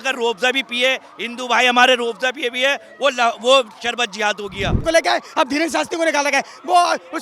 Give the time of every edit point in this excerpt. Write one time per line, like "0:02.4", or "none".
0:04.8